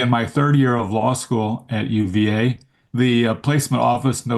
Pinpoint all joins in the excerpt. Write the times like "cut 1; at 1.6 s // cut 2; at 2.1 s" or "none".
none

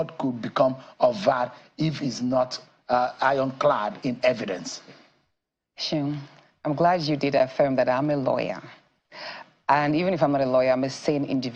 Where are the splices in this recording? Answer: none

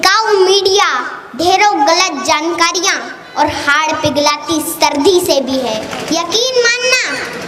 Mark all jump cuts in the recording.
cut 1; at 5.9 s

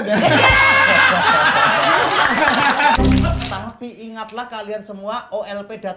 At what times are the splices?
cut 1; at 3.0 s

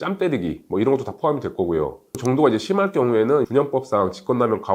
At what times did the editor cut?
cut 1; at 2.1 s

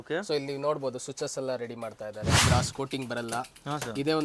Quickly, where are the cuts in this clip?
cut 1; at 2.4 s

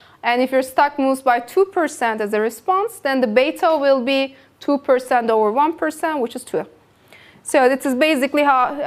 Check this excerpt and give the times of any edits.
cut 1; at 4.7 s

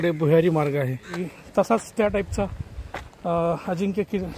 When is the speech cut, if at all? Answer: cut 1; at 1.3 s

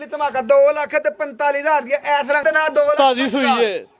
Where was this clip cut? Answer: cut 1; at 2.4 s

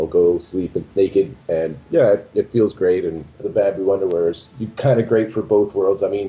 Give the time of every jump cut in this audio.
cut 1; at 3.4 s

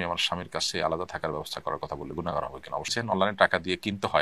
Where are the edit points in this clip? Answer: cut 1; at 2.9 s

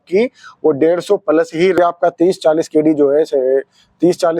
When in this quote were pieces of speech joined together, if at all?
cut 1; at 1.8 s

